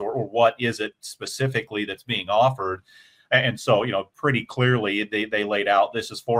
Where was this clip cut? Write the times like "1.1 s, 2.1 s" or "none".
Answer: none